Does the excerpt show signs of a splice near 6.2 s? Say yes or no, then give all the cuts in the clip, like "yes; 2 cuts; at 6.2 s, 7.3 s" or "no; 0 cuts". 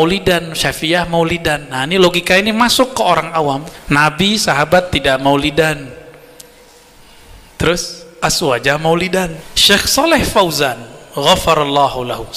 no; 2 cuts; at 3.7 s, 9.5 s